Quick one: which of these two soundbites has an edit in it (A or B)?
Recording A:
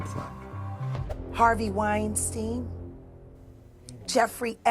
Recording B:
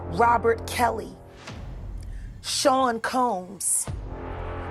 A